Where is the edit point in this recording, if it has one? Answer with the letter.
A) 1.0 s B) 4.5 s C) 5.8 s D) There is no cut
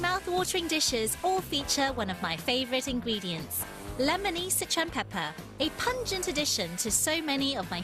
C